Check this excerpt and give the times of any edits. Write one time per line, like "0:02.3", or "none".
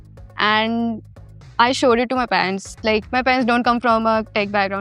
none

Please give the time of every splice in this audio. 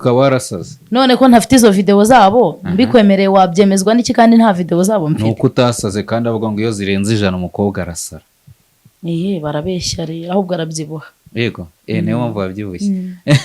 none

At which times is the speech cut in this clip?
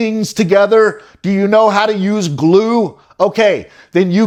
none

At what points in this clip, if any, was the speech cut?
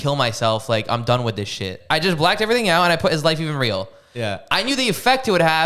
0:01.7

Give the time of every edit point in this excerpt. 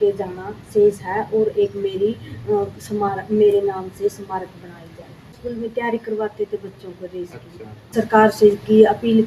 0:05.4
0:07.9

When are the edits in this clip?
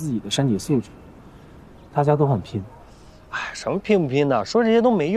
none

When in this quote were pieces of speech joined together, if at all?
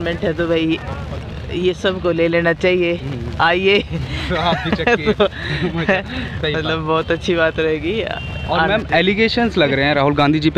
none

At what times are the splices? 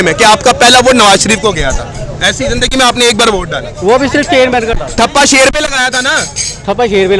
none

